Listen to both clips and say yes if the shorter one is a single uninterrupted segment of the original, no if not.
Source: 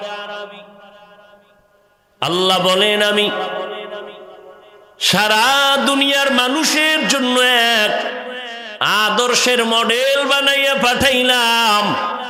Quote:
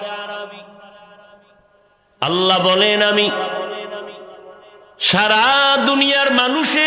yes